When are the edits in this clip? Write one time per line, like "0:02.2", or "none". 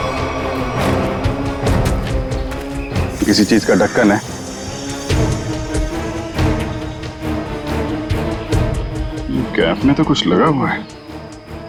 none